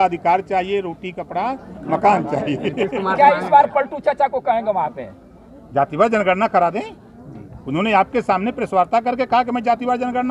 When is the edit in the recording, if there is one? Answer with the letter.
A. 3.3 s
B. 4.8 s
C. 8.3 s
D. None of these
D